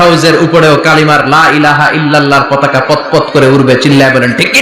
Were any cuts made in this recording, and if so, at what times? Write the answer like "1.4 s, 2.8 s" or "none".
none